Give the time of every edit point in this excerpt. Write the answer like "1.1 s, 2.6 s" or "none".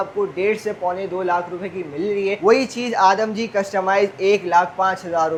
none

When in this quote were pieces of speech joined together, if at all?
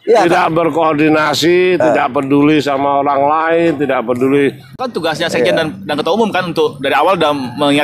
4.8 s

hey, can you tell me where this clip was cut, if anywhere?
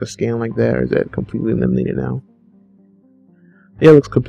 2.4 s

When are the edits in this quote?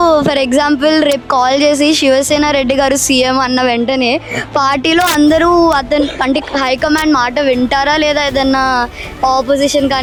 none

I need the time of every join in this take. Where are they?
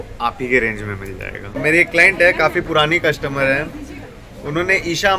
1.6 s

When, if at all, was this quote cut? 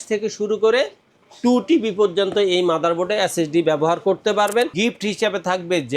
4.7 s

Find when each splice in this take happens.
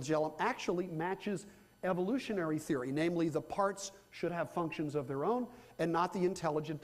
4.2 s

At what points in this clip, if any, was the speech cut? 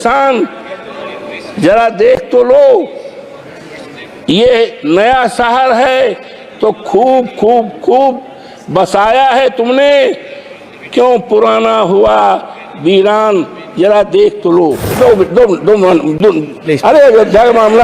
14.9 s

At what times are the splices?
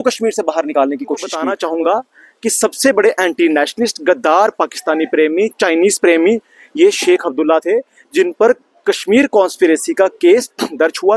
1.4 s

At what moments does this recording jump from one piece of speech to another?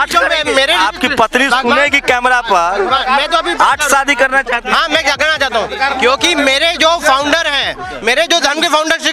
0.8 s, 5.9 s

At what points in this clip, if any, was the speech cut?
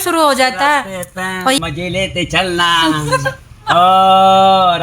1.6 s

